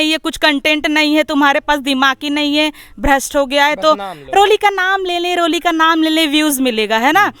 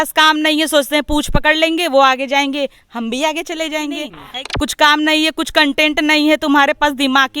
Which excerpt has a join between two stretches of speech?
second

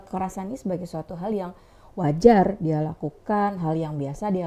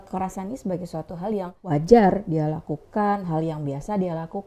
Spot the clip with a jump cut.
second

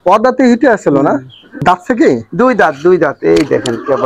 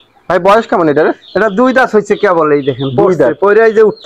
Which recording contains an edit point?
first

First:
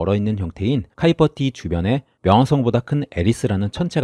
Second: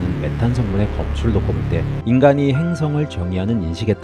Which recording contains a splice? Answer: second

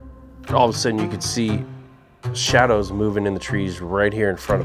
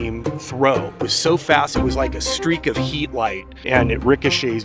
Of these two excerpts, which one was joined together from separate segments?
second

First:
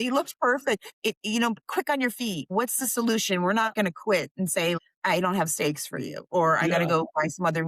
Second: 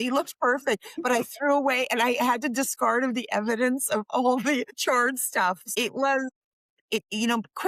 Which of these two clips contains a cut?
first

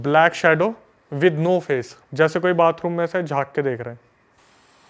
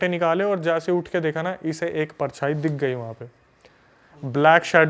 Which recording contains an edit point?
first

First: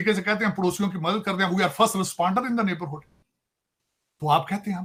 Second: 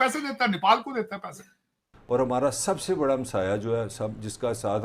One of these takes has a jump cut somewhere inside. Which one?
second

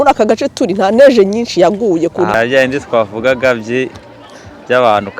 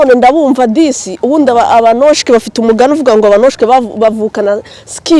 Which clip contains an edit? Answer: first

